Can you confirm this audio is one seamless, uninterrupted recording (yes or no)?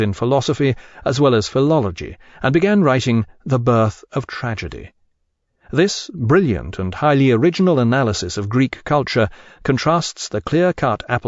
no